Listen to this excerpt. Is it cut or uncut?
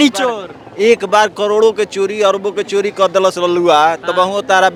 uncut